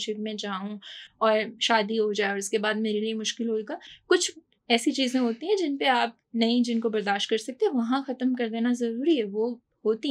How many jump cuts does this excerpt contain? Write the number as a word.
zero